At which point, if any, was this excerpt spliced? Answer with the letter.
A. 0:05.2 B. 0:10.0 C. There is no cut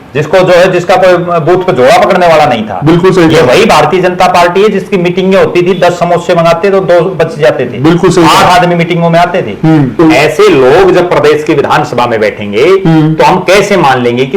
B